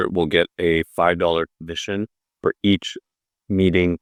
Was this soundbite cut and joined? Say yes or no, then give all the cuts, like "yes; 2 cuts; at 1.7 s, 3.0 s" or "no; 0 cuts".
no; 0 cuts